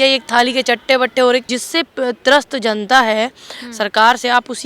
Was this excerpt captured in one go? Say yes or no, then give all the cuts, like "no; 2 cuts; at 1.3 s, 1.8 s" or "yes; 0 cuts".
no; 1 cut; at 1.5 s